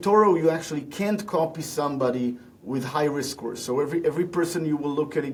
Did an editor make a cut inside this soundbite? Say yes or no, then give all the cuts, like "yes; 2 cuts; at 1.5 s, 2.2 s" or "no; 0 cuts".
no; 0 cuts